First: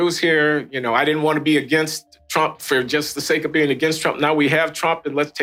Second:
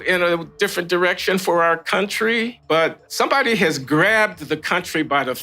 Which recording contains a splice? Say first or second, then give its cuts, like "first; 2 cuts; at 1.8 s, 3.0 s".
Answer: second; 1 cut; at 3.0 s